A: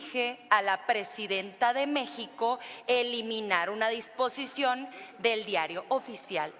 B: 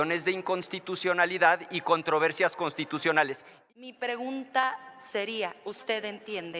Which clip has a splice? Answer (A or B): B